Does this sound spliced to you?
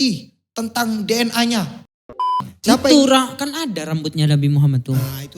yes; 1 cut; at 2.3 s

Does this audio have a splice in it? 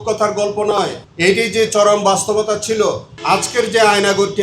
yes; 2 cuts; at 1.0 s, 3.1 s

